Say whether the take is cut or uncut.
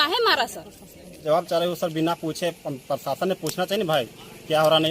cut